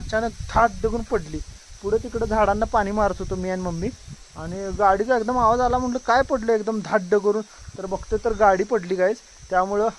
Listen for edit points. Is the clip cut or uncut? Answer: uncut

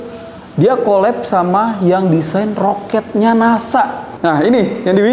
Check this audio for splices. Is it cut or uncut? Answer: cut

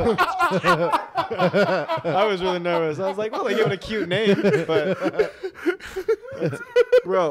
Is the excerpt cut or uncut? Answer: uncut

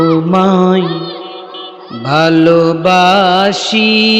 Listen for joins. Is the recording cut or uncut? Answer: uncut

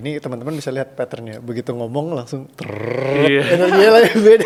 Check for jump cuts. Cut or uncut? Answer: uncut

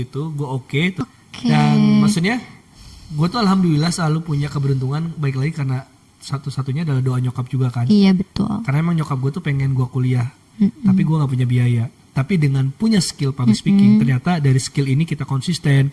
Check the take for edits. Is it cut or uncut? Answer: uncut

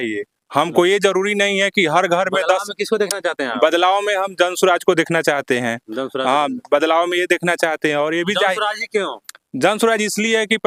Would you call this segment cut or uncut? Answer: uncut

